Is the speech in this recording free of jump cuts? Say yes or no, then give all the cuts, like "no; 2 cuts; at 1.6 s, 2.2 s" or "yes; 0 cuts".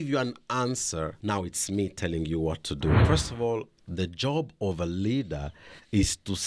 no; 2 cuts; at 1.2 s, 3.0 s